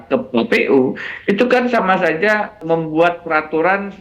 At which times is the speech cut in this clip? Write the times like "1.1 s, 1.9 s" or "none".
2.6 s